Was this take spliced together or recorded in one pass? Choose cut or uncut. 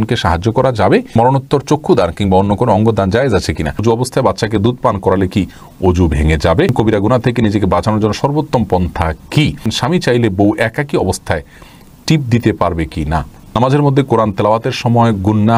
cut